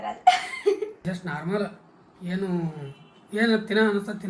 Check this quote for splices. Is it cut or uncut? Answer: cut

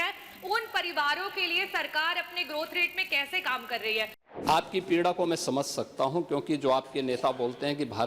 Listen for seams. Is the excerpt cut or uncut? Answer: cut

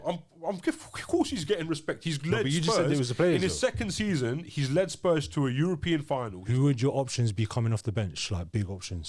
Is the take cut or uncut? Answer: cut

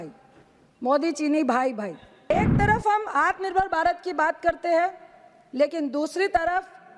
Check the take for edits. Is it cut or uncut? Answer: cut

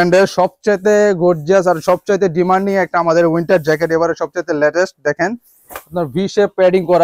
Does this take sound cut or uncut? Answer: uncut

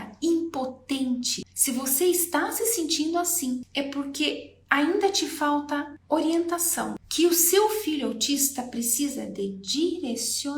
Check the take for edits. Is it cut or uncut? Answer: cut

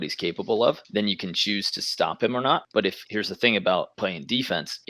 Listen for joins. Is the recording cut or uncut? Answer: cut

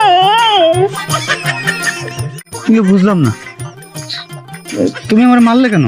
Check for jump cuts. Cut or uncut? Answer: uncut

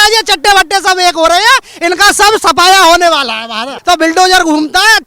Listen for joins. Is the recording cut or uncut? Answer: cut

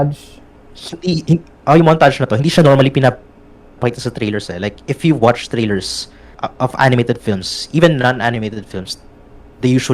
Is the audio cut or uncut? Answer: cut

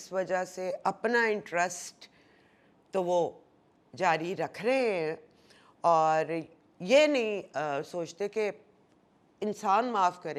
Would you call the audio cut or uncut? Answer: uncut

